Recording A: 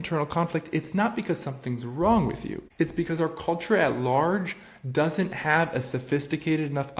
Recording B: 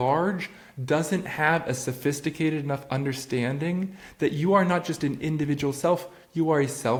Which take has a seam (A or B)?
A